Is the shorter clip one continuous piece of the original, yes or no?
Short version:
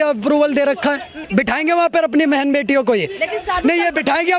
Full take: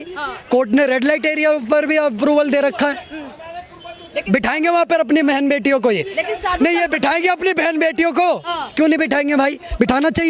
no